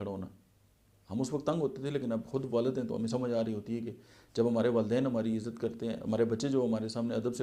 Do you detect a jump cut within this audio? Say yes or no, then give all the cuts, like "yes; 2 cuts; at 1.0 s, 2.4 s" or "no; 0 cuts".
no; 0 cuts